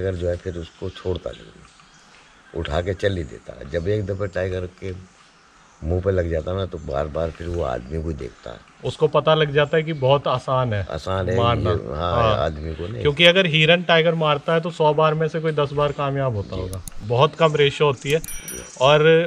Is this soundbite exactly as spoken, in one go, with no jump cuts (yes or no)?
yes